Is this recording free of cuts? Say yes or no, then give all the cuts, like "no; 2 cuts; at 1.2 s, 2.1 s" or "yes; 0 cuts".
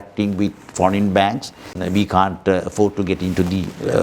no; 1 cut; at 1.7 s